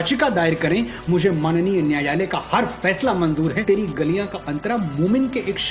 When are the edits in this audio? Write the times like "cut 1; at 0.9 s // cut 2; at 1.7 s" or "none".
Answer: cut 1; at 3.6 s

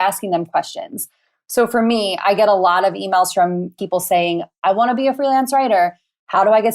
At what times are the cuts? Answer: cut 1; at 3.7 s

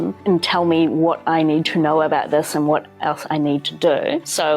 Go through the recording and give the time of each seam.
none

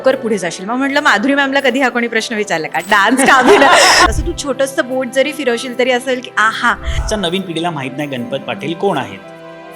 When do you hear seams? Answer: cut 1; at 4.1 s // cut 2; at 7.0 s

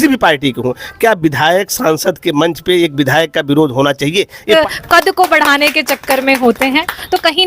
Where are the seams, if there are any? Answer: cut 1; at 4.5 s

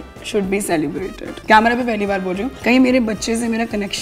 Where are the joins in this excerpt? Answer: cut 1; at 1.4 s // cut 2; at 2.5 s

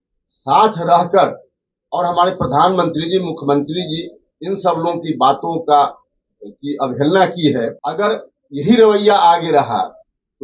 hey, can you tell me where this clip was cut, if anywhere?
cut 1; at 7.8 s

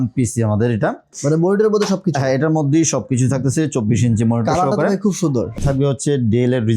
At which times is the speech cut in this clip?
cut 1; at 1.1 s // cut 2; at 5.6 s

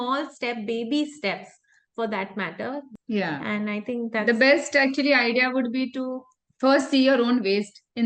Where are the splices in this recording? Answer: cut 1; at 2.9 s

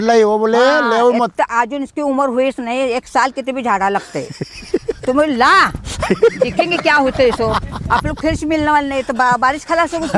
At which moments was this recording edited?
none

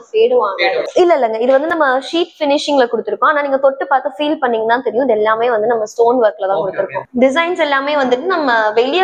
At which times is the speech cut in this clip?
cut 1; at 0.9 s // cut 2; at 7.0 s

